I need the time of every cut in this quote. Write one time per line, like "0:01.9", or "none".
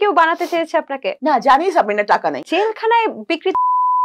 0:01.1
0:02.4